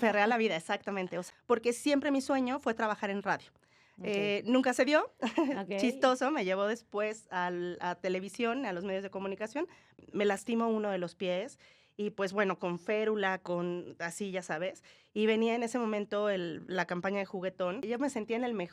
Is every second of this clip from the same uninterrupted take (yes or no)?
no